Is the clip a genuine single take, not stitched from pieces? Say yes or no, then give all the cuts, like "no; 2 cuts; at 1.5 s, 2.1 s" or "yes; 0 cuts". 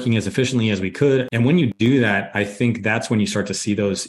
no; 1 cut; at 1.6 s